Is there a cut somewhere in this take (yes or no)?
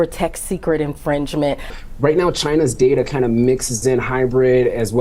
yes